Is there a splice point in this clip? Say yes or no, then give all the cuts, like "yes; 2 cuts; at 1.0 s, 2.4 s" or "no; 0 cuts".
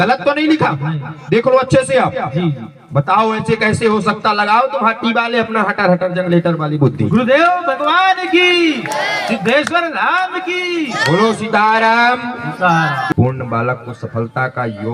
yes; 1 cut; at 13.1 s